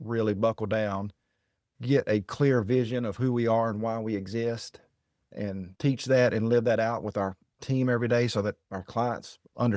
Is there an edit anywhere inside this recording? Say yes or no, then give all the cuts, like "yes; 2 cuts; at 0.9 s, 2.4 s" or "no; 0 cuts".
no; 0 cuts